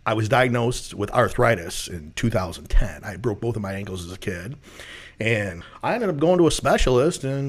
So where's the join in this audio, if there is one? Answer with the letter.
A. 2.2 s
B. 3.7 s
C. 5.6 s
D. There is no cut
C